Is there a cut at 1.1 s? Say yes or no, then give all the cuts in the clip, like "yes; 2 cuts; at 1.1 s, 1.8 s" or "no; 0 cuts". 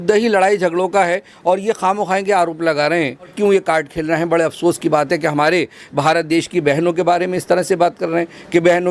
no; 1 cut; at 3.3 s